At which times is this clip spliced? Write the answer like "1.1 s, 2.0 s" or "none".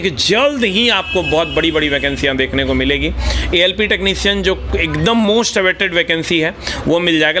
none